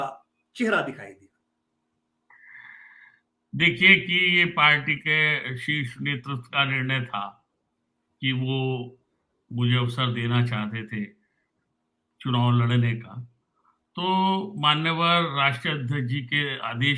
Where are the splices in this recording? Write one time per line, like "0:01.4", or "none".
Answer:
none